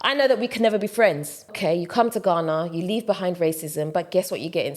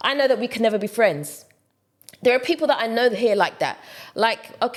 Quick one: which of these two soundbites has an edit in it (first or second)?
first